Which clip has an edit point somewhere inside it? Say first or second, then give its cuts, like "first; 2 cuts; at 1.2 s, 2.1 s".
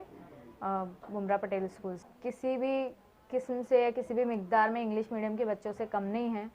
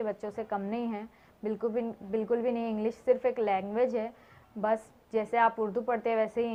first; 1 cut; at 2.1 s